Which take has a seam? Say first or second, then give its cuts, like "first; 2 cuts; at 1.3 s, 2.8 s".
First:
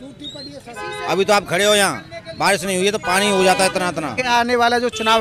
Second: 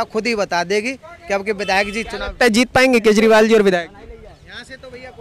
first; 1 cut; at 4.2 s